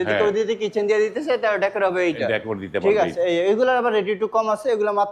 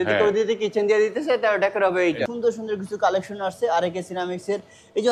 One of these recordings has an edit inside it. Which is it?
second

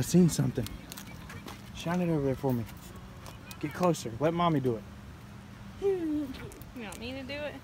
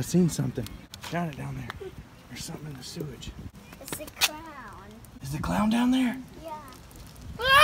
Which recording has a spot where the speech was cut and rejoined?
second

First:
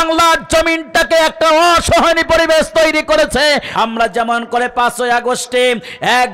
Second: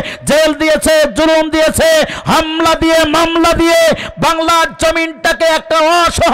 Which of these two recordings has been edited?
first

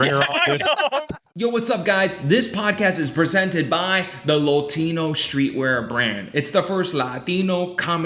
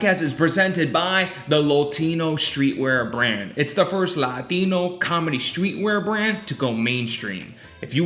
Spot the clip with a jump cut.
first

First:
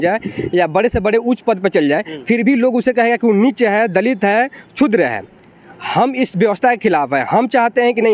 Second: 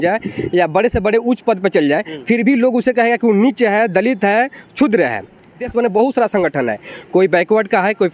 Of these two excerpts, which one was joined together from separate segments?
second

